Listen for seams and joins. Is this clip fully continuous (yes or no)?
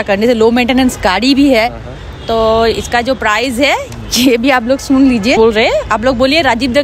no